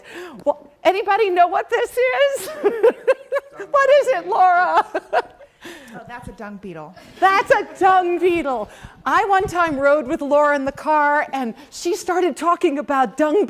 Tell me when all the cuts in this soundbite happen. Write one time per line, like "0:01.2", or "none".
0:02.2

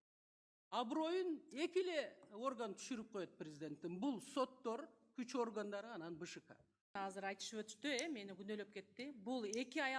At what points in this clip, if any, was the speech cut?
0:06.9

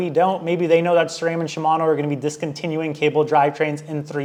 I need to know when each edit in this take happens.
none

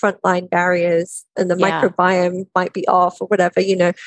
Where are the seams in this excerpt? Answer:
0:01.3

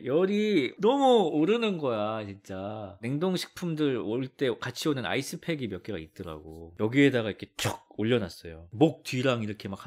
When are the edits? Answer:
0:03.0
0:06.6
0:08.7

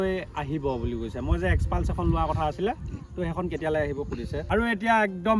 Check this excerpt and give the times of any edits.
0:04.4

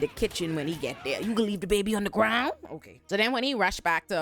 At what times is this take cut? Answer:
none

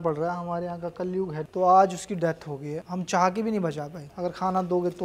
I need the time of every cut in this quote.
0:01.5
0:04.1

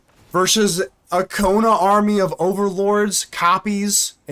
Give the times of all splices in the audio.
none

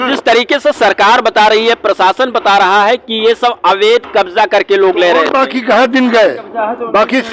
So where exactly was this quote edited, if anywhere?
none

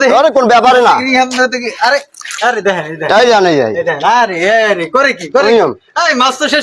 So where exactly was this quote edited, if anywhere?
none

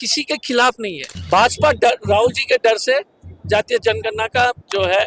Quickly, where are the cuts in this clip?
0:01.1

